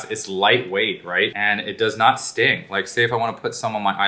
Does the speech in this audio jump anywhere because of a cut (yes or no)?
no